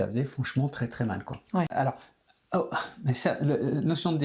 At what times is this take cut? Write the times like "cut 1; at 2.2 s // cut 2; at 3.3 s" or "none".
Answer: cut 1; at 1.7 s